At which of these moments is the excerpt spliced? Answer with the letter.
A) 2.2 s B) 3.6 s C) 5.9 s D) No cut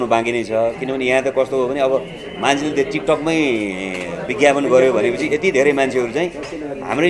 D